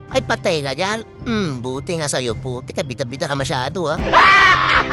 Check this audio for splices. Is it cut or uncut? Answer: uncut